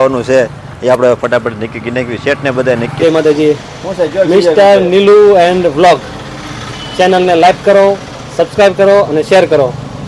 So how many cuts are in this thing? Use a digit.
1